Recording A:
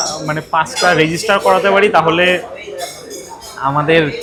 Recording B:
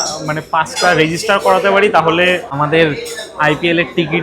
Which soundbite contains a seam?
B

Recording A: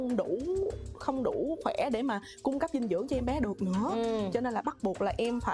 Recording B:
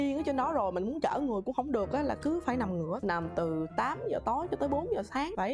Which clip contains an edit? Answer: B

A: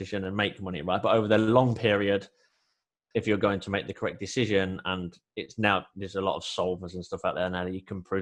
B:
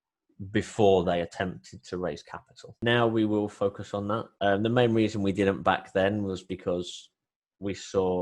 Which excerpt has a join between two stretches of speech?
B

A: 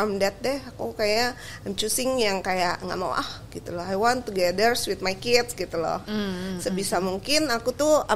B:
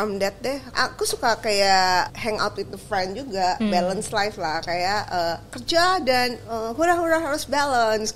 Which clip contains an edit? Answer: B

